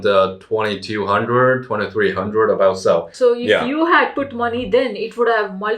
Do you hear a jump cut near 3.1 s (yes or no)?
yes